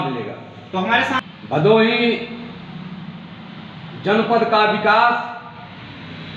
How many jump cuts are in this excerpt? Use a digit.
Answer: 1